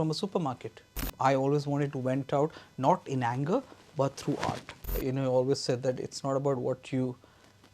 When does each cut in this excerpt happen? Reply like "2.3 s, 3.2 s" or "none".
1.1 s, 4.9 s